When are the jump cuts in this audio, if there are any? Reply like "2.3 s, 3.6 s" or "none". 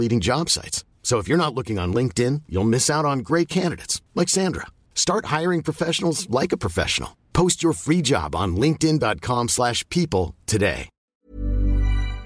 11.0 s